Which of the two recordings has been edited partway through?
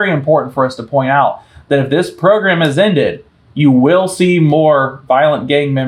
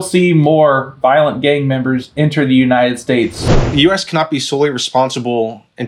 second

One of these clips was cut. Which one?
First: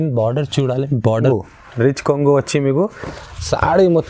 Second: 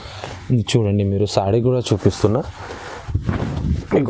first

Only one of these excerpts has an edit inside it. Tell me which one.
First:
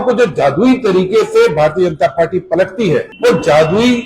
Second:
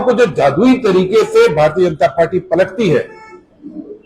first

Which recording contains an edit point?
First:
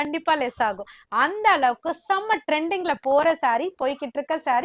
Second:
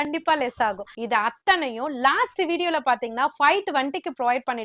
second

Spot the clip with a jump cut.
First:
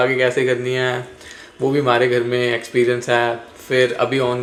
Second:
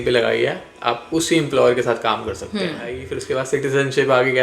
second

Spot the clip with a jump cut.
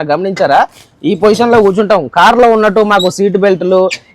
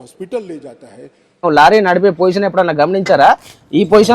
second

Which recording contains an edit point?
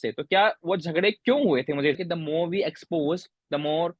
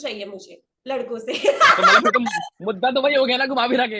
first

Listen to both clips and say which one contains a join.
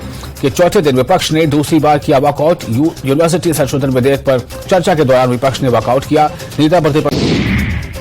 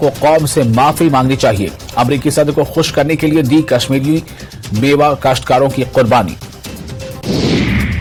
first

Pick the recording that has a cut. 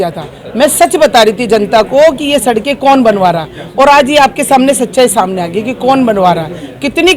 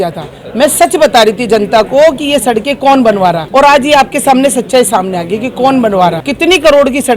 second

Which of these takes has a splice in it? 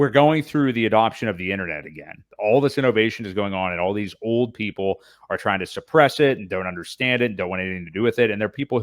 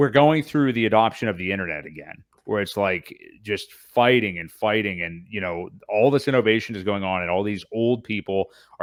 first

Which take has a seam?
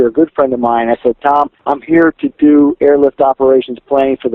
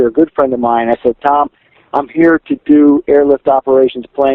first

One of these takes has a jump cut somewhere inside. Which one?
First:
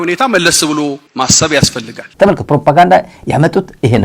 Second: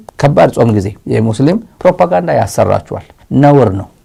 first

